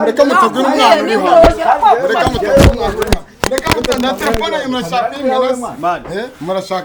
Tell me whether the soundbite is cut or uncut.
uncut